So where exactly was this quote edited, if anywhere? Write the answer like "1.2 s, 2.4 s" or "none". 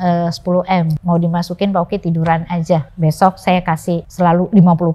1.0 s, 2.9 s, 4.1 s